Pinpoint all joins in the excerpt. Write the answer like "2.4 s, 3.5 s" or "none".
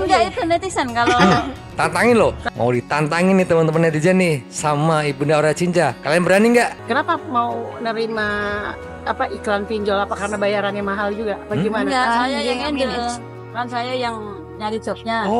2.4 s, 6.8 s